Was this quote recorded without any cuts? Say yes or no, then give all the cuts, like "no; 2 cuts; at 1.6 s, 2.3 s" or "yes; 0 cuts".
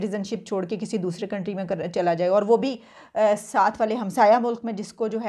yes; 0 cuts